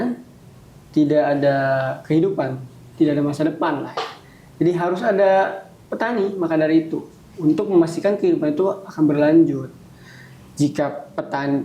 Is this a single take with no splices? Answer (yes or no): yes